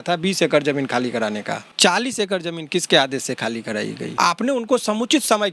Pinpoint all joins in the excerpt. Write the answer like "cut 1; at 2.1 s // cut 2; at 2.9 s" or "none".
cut 1; at 1.8 s // cut 2; at 4.1 s